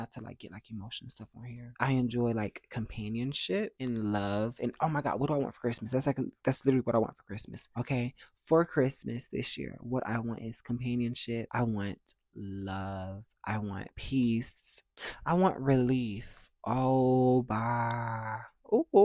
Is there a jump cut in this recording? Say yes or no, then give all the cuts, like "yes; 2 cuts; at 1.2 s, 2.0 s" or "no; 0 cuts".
yes; 1 cut; at 1.7 s